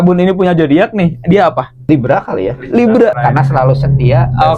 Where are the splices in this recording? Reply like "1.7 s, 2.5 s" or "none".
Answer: 1.9 s, 3.2 s